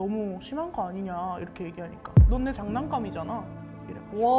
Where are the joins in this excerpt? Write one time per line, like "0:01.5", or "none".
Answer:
none